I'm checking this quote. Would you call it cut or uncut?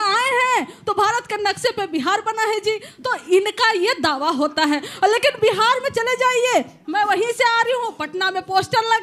uncut